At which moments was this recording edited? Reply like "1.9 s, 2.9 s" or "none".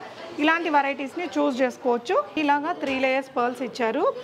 2.3 s